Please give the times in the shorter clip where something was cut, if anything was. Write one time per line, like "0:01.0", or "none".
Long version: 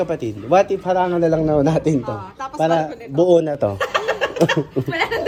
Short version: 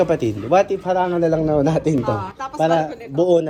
none